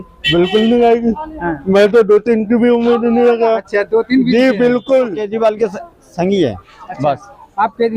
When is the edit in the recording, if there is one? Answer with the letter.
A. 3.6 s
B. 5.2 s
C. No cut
B